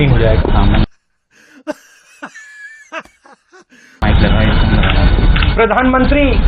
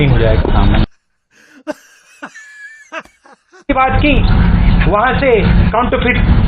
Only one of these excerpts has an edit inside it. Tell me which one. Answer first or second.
first